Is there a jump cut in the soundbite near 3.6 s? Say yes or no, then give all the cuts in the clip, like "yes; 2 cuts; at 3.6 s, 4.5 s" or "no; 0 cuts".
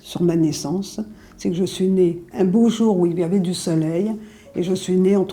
no; 1 cut; at 2.2 s